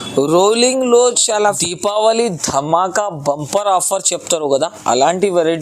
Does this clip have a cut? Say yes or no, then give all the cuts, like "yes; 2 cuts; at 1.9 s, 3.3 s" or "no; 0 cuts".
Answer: yes; 1 cut; at 1.6 s